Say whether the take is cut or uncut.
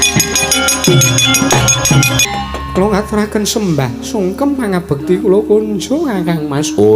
cut